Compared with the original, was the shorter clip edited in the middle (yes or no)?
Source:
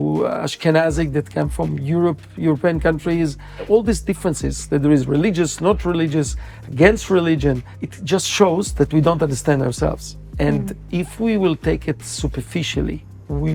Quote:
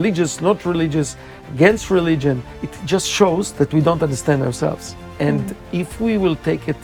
no